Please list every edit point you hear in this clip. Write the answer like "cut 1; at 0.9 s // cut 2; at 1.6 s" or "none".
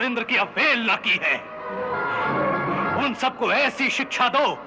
none

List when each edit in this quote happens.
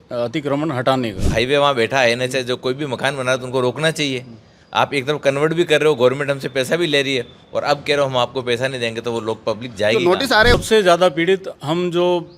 cut 1; at 1.3 s // cut 2; at 10.5 s

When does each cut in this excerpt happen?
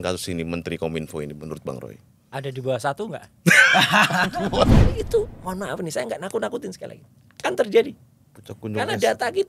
cut 1; at 4.8 s

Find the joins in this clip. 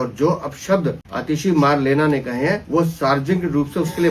cut 1; at 1.1 s // cut 2; at 2.6 s

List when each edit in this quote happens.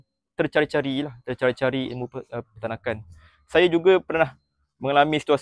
none

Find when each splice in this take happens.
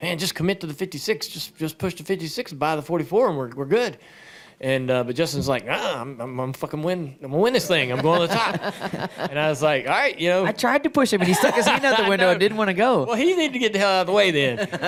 none

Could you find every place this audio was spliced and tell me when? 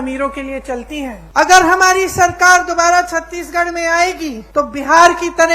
cut 1; at 1.2 s // cut 2; at 4.4 s

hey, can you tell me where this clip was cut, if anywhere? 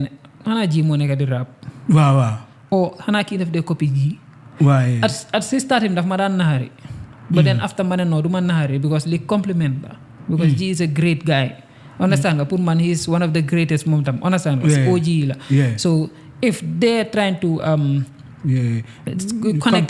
none

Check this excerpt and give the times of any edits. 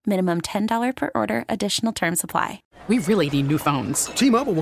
cut 1; at 2.6 s

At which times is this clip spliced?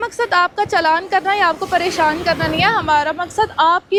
none

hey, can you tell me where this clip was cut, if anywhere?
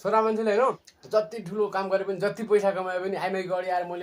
cut 1; at 0.9 s

